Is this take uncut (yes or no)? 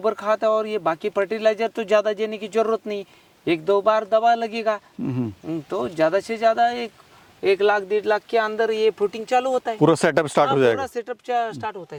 yes